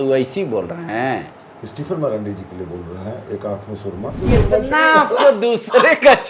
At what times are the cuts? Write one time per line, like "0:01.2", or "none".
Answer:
0:04.2